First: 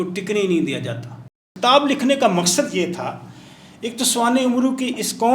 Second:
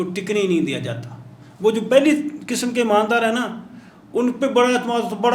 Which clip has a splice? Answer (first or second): first